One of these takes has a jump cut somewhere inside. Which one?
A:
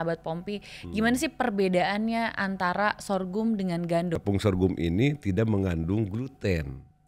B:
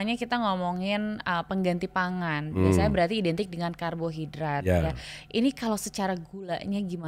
A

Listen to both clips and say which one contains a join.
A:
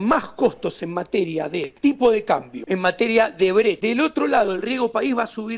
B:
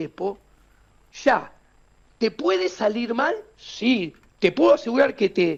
A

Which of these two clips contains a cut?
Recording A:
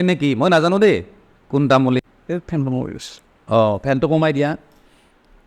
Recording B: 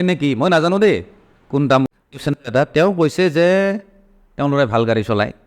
B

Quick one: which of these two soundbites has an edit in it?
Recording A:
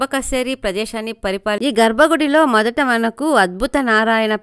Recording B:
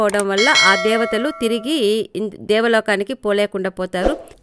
A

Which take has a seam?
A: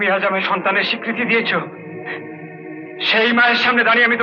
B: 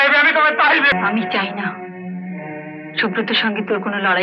B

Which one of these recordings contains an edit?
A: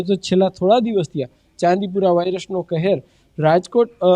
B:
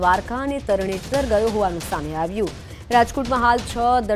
A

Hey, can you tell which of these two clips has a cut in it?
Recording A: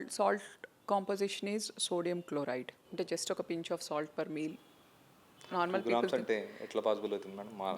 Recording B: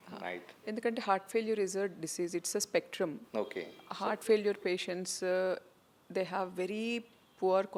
A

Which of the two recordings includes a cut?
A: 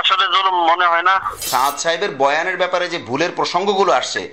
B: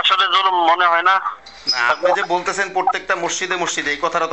A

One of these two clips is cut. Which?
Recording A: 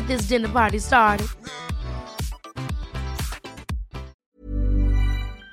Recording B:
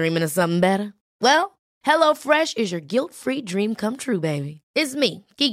A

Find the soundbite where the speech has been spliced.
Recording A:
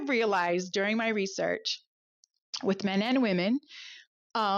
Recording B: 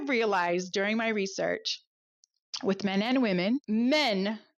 B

